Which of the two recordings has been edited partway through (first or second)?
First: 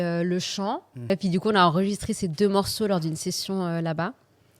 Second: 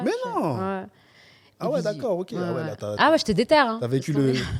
first